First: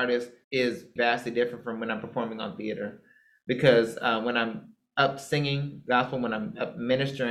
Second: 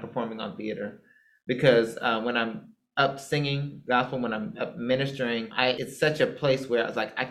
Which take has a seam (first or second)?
first